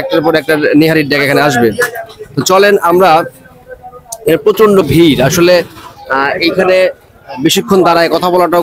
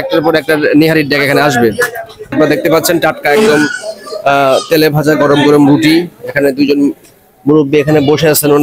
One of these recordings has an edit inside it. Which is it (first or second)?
second